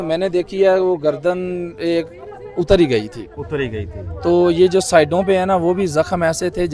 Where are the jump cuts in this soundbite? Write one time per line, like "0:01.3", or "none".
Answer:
none